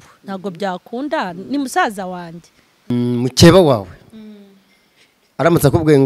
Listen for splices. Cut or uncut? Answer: cut